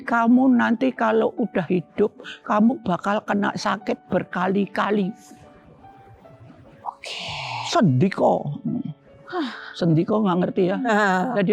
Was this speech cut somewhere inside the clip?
no; 0 cuts

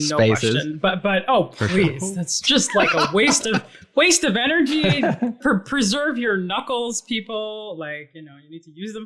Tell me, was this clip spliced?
no; 0 cuts

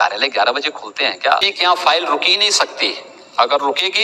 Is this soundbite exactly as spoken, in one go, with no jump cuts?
no; 1 cut; at 1.5 s

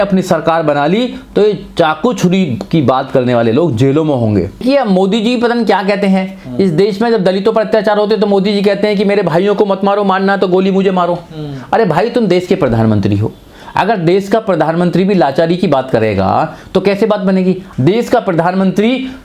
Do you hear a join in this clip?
yes; 2 cuts; at 4.6 s, 17.7 s

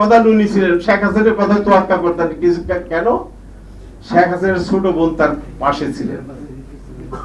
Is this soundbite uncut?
yes; 0 cuts

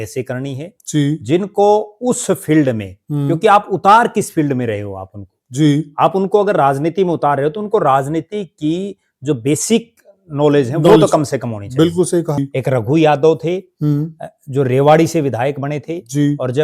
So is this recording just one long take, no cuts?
no; 1 cut; at 12.4 s

